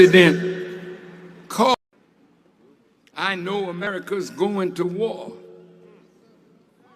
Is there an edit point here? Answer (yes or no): yes